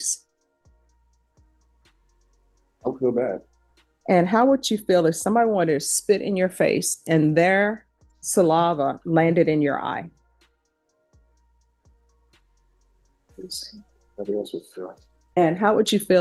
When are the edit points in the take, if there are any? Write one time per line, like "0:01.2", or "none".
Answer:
none